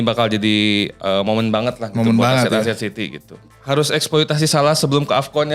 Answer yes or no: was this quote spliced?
yes